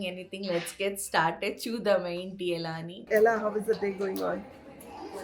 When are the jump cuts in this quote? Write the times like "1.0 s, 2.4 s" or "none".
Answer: 2.9 s